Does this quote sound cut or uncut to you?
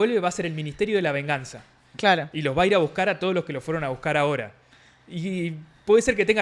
uncut